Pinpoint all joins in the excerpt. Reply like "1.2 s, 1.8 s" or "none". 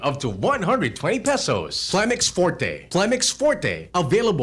1.9 s

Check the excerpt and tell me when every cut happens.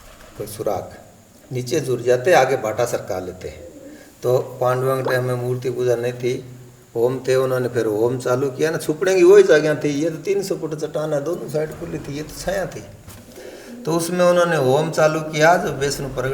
none

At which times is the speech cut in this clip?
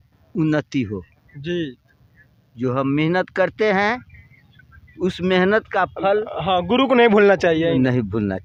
none

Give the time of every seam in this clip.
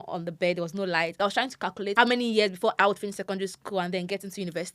1.5 s, 2.8 s

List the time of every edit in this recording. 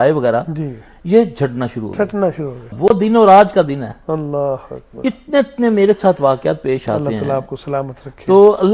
2.7 s

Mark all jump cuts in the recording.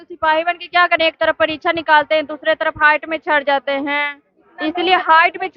none

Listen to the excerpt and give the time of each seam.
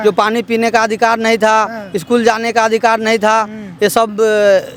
none

